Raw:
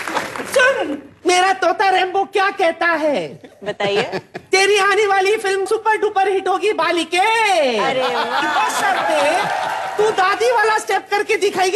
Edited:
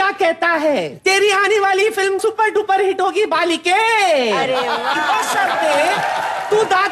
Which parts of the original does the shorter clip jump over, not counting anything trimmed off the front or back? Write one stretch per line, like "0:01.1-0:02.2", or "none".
0:03.3-0:04.4